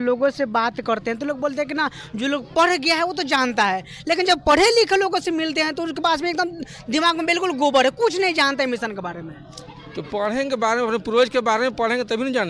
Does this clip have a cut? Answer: no; 0 cuts

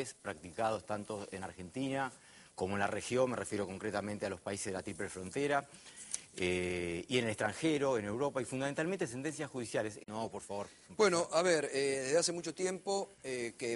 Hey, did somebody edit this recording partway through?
no; 0 cuts

